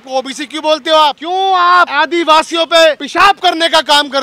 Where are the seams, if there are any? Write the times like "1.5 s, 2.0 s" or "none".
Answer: 1.2 s, 1.9 s, 3.1 s